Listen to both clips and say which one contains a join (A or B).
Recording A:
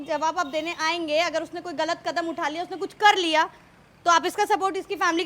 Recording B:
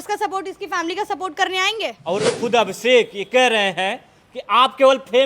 B